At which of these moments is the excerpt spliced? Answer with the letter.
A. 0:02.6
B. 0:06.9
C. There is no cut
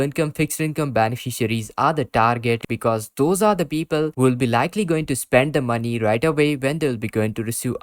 A